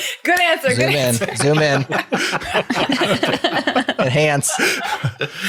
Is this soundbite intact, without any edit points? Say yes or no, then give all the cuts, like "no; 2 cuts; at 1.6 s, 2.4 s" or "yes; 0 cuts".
yes; 0 cuts